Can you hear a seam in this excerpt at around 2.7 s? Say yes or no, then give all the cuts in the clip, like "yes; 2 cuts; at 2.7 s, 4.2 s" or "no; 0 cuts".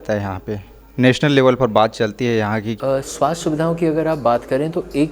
yes; 1 cut; at 2.7 s